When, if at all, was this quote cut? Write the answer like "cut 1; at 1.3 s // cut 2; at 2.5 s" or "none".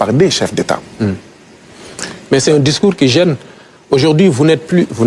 none